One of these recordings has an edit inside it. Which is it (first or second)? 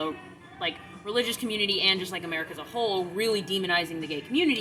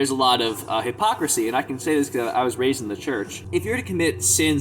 second